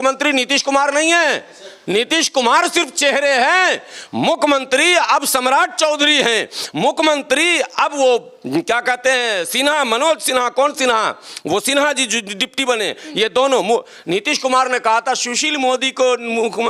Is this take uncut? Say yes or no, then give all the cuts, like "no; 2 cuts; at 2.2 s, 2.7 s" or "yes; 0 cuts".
yes; 0 cuts